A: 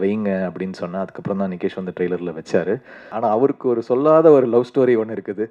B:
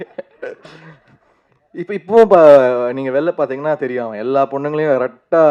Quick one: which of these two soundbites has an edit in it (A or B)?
A